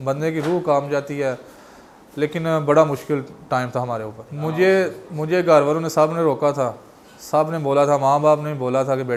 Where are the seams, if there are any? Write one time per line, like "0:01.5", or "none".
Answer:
none